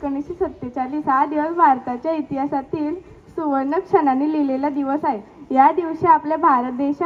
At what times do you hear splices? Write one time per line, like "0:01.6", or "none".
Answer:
none